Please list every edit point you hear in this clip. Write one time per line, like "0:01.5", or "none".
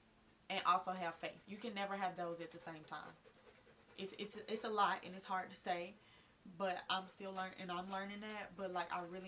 none